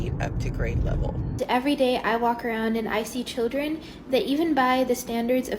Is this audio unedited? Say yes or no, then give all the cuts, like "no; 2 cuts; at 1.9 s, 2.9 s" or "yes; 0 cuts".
no; 1 cut; at 1.4 s